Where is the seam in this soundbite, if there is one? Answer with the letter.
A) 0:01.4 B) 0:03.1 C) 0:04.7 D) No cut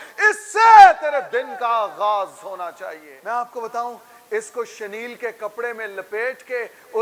B